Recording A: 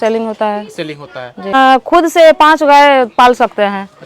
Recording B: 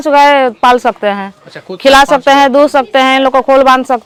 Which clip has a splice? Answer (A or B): A